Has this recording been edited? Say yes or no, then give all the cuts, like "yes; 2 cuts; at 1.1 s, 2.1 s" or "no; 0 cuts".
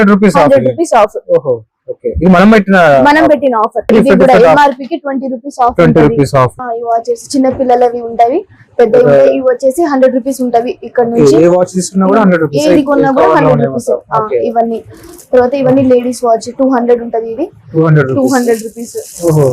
yes; 2 cuts; at 3.9 s, 6.6 s